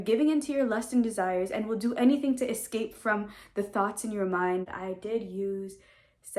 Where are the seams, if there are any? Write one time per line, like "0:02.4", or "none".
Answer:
0:04.7